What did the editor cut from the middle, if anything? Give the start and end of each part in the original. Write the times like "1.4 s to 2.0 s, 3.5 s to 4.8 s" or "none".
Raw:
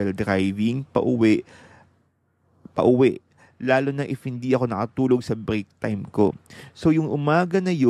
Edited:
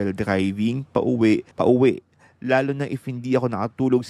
1.5 s to 2.7 s